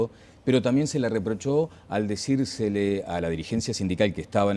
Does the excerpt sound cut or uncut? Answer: cut